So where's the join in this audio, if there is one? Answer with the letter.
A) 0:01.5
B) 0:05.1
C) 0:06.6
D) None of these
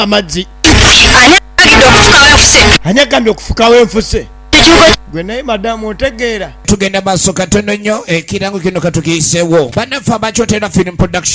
C